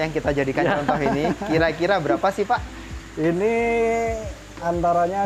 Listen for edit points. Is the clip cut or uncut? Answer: uncut